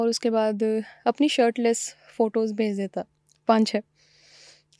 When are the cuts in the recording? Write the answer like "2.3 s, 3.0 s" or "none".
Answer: none